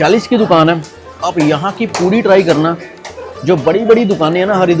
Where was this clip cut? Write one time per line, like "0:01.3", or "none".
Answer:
none